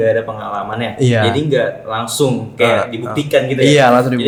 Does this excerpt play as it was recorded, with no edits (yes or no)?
yes